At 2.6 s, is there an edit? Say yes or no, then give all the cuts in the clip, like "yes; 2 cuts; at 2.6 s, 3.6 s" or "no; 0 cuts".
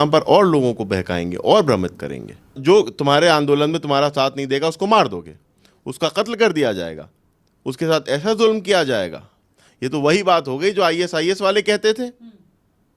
yes; 1 cut; at 2.6 s